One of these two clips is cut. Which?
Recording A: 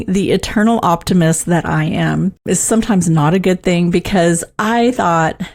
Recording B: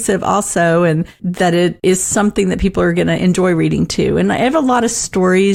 A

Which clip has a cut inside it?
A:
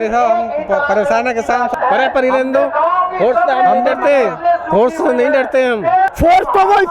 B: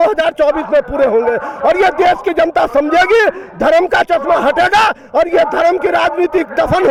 A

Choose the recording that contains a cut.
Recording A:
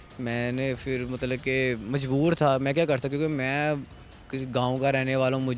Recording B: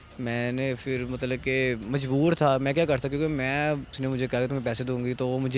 B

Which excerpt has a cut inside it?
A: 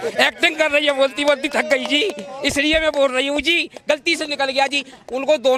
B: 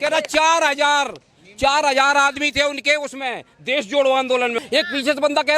B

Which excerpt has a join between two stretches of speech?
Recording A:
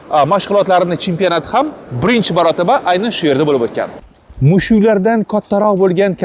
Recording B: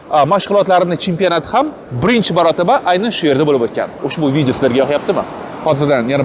A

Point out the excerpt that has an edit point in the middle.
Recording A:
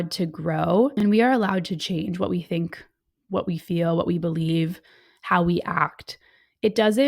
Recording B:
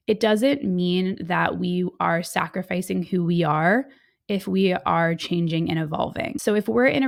A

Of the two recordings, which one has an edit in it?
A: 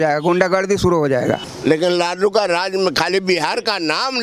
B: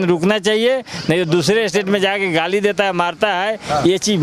A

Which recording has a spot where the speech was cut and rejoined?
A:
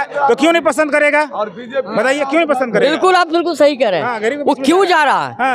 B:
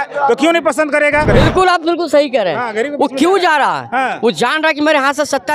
B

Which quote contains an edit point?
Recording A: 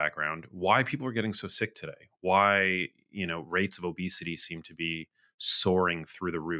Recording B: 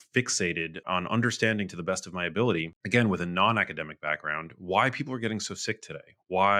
B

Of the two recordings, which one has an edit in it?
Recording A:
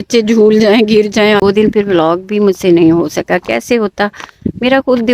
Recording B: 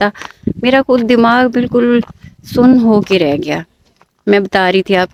A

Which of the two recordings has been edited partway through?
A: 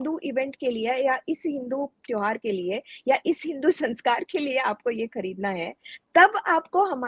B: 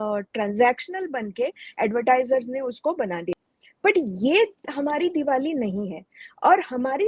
B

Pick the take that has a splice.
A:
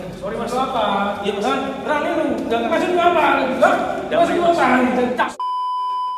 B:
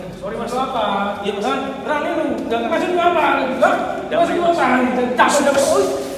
A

